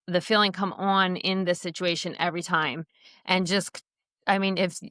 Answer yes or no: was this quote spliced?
no